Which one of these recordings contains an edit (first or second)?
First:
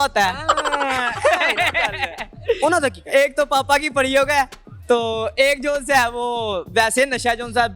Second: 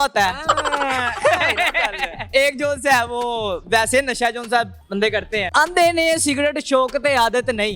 second